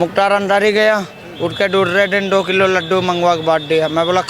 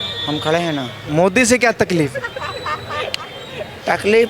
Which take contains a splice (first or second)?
second